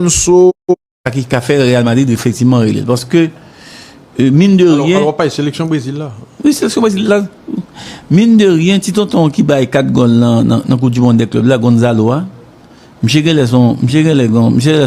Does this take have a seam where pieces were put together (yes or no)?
yes